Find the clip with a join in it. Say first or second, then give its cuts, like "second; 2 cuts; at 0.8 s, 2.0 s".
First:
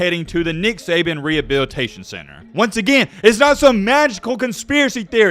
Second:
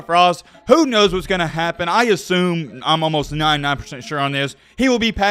first; 1 cut; at 2.4 s